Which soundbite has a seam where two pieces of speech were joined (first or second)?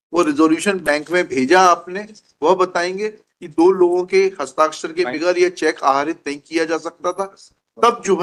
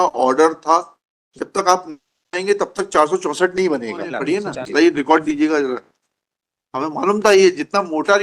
second